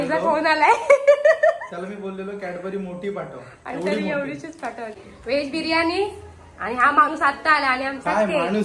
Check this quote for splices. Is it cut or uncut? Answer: cut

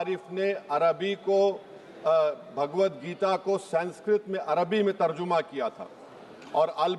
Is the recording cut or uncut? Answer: uncut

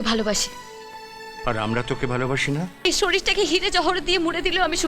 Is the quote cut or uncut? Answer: cut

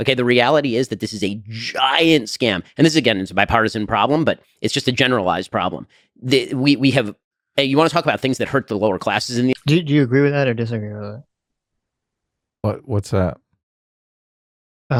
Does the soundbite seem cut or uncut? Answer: uncut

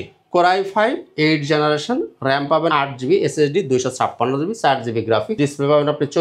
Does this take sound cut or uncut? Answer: cut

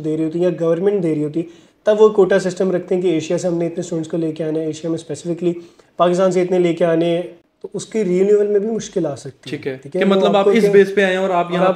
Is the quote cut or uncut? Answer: cut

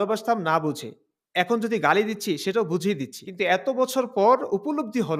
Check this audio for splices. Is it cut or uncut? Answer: cut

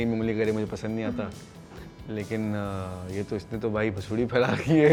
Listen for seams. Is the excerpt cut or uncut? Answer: uncut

